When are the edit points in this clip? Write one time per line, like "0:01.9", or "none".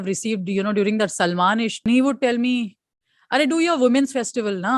0:01.8